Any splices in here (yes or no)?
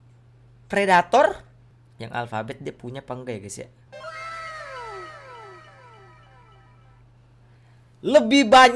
yes